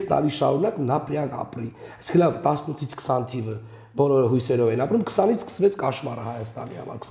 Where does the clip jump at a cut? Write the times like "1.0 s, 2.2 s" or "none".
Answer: none